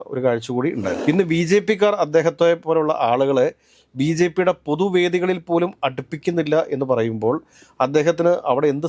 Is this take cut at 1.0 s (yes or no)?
yes